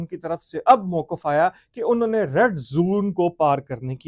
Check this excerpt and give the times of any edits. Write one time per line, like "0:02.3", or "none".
none